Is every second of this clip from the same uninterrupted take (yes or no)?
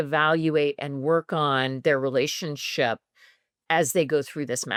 yes